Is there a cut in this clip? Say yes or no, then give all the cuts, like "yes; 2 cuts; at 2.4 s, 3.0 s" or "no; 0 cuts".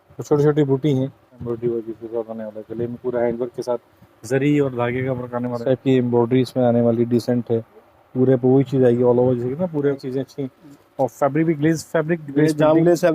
yes; 3 cuts; at 1.4 s, 5.6 s, 10.0 s